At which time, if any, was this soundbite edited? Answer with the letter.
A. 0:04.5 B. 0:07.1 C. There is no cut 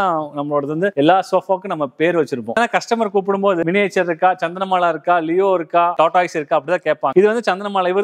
B